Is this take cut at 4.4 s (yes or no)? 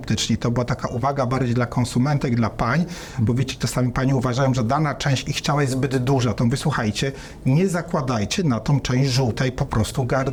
no